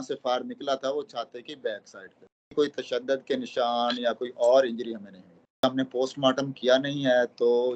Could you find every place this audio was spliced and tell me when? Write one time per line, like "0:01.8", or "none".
0:02.5
0:05.6